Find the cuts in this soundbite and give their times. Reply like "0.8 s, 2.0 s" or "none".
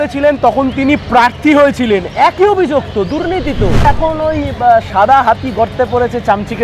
3.8 s